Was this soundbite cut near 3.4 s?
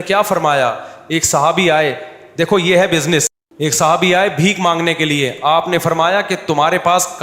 yes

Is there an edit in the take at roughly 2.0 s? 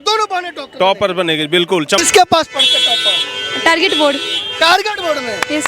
yes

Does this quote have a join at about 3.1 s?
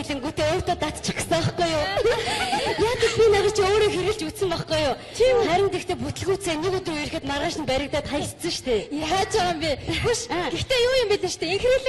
yes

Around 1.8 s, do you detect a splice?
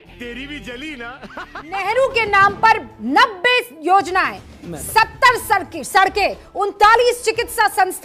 yes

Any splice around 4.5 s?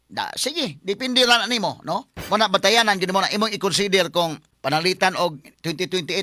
yes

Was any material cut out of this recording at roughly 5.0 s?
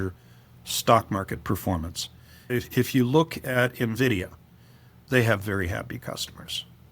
yes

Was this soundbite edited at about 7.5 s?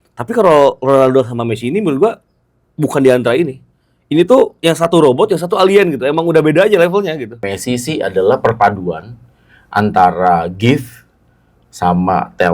yes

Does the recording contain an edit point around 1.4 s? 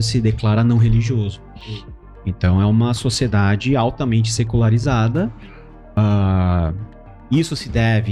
no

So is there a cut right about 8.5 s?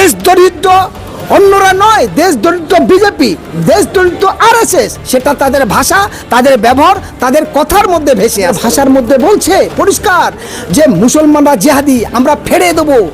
yes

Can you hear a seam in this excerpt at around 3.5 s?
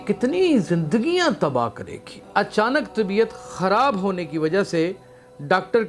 no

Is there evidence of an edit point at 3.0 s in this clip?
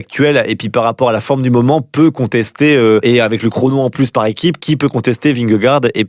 yes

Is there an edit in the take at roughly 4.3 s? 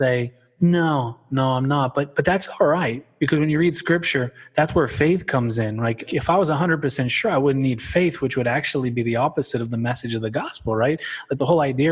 no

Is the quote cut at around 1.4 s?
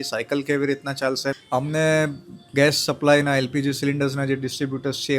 yes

